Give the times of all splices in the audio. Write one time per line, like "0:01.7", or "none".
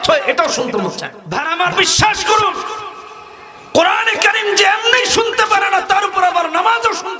0:01.5